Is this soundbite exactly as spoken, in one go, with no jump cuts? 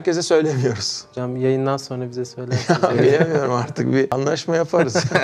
yes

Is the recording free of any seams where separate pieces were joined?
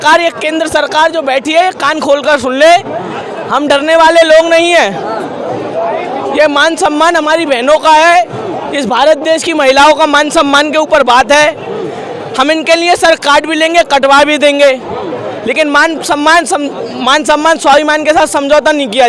yes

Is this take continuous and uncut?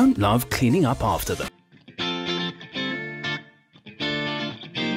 no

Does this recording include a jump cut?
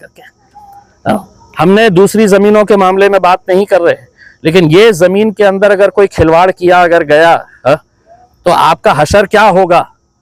no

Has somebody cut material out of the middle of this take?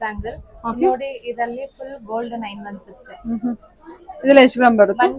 no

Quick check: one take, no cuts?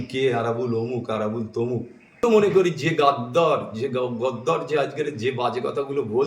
no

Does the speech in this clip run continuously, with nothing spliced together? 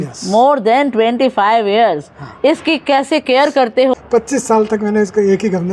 no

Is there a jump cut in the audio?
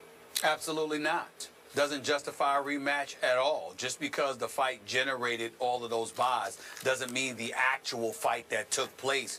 no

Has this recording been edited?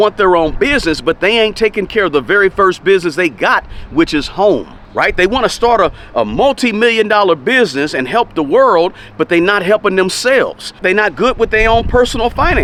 no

